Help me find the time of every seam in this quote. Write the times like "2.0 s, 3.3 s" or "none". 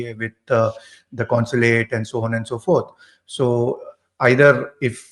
none